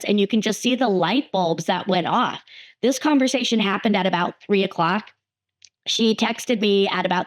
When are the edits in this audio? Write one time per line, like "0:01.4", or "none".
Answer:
none